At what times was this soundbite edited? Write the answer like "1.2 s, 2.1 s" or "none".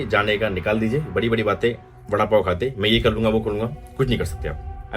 none